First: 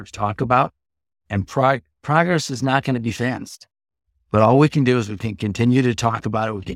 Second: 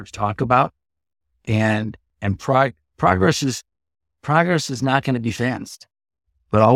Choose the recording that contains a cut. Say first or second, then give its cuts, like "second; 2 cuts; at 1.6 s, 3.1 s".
first; 1 cut; at 1.4 s